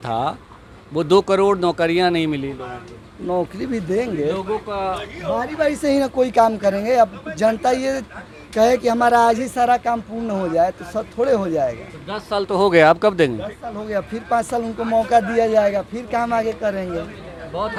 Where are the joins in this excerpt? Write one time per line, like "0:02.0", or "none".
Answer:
none